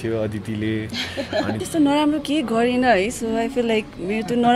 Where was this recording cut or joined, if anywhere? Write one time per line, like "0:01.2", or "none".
0:01.6